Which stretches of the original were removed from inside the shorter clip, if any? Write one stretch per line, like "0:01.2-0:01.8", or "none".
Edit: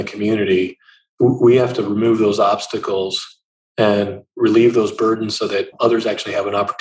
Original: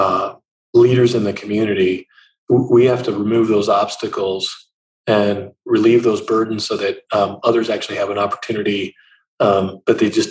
0:07.0-0:07.4